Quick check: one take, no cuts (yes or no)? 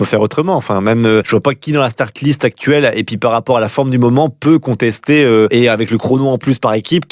no